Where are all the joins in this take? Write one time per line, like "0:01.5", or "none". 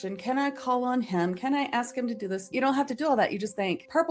0:02.5